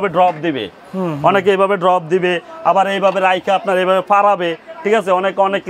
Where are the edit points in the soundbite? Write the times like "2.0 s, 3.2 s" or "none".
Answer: none